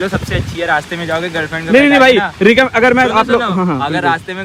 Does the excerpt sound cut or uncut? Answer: uncut